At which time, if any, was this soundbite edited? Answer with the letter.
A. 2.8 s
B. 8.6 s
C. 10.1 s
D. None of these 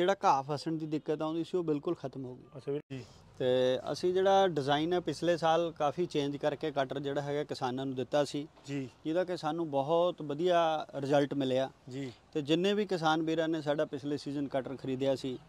A